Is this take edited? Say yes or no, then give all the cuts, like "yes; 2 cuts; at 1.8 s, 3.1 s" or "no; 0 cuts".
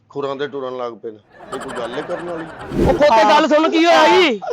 yes; 1 cut; at 2.8 s